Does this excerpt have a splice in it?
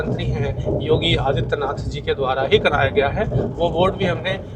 no; 0 cuts

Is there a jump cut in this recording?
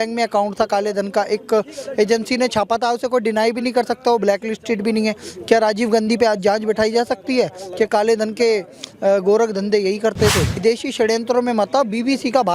yes; 1 cut; at 10.6 s

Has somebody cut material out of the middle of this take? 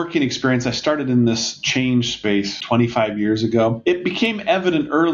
yes; 2 cuts; at 2.6 s, 3.8 s

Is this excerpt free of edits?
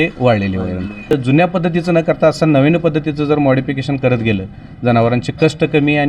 no; 1 cut; at 1.2 s

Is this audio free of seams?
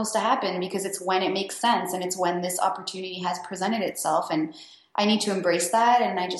yes; 0 cuts

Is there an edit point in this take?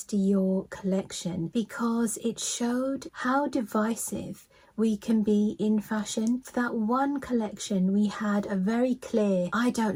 no; 0 cuts

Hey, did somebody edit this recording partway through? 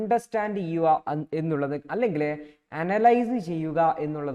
no; 0 cuts

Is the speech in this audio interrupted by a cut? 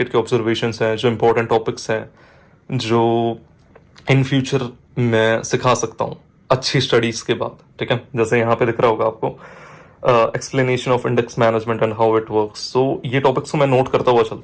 no; 0 cuts

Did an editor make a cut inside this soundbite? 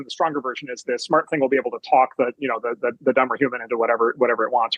no; 0 cuts

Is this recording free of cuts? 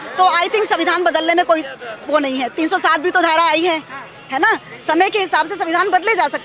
yes; 0 cuts

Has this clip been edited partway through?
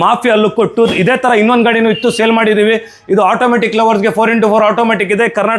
no; 0 cuts

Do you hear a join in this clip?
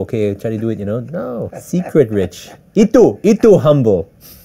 yes; 1 cut; at 1.6 s

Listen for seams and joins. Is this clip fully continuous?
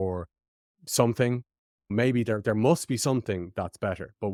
yes; 0 cuts

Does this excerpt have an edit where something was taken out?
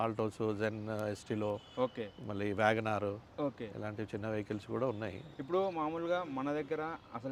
no; 0 cuts

